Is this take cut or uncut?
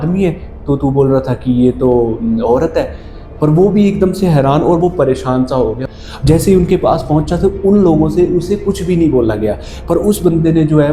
cut